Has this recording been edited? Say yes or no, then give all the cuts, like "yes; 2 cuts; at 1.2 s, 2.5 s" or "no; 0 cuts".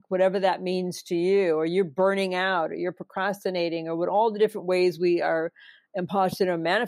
no; 0 cuts